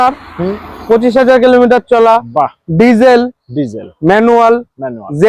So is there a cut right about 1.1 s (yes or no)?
no